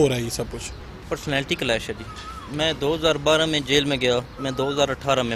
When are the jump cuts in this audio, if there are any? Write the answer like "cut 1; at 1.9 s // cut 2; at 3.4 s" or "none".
cut 1; at 0.9 s // cut 2; at 4.4 s

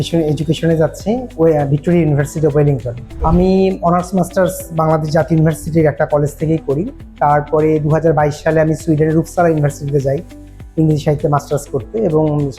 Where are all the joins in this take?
cut 1; at 3.1 s

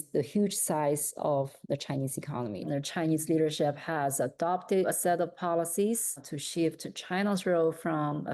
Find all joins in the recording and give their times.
cut 1; at 2.7 s // cut 2; at 4.9 s

